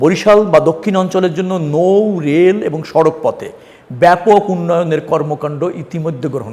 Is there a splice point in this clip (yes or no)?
no